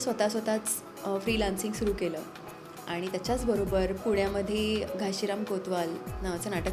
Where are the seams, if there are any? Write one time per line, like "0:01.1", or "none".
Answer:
none